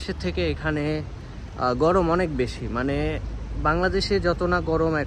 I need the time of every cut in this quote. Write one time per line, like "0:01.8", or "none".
none